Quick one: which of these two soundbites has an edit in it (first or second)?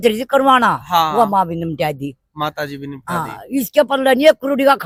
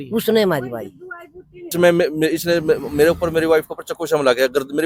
second